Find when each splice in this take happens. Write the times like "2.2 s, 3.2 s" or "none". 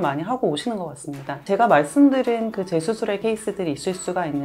3.2 s

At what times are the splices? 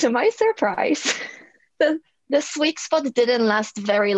1.6 s

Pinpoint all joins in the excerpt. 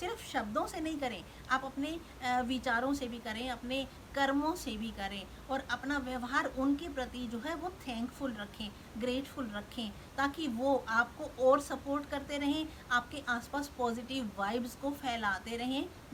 none

